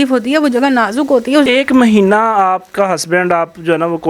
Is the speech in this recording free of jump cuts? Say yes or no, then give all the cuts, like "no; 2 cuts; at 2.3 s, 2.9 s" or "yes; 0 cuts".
no; 1 cut; at 1.5 s